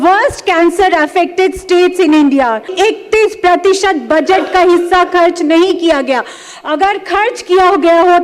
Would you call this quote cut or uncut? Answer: cut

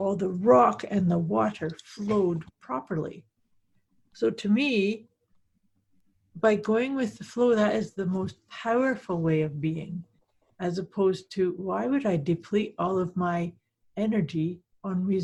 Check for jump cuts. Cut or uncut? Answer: uncut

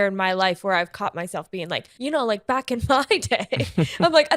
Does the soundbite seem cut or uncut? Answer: cut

